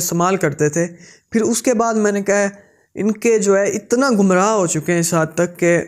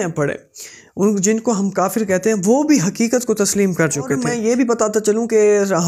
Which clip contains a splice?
second; 1 cut; at 4.3 s

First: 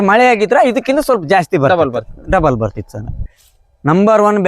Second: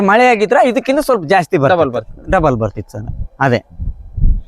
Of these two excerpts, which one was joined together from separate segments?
first; 1 cut; at 3.2 s

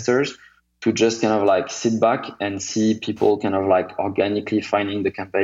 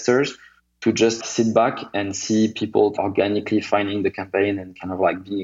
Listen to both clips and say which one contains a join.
second; 2 cuts; at 1.2 s, 2.9 s

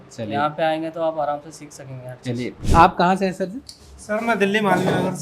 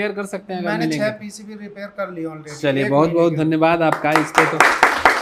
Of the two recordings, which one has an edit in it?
first; 1 cut; at 2.6 s

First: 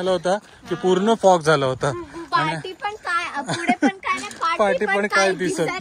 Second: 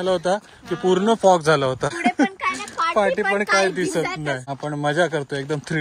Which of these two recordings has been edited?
second; 2 cuts; at 2.0 s, 4.5 s

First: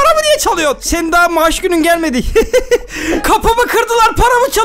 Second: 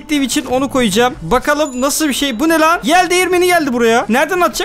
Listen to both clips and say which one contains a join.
first; 1 cut; at 3.2 s

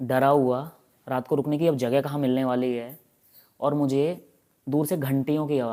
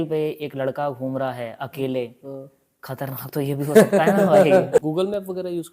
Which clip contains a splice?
second; 1 cut; at 4.8 s

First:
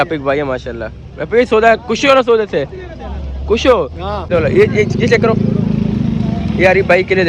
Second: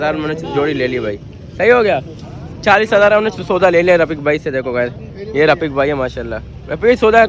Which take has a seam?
first; 1 cut; at 4.3 s

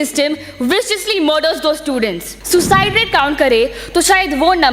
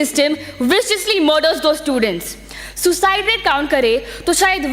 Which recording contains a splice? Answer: first; 1 cut; at 2.3 s

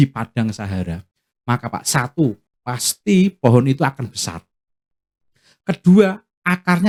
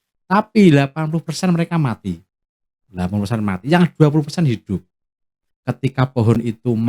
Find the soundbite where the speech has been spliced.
second; 1 cut; at 5.5 s

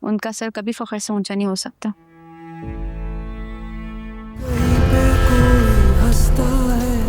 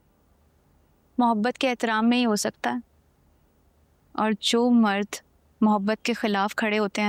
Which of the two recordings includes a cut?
first; 1 cut; at 4.5 s

